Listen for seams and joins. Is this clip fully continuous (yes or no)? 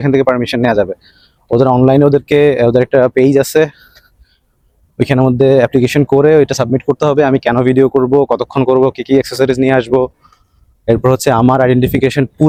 yes